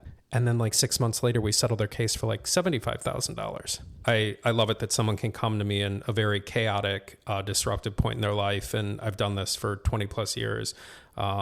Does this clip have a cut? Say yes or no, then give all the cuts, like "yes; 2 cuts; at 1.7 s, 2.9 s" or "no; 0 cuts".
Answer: yes; 1 cut; at 4.0 s